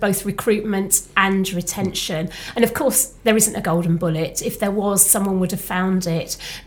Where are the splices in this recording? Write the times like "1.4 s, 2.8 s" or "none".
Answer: none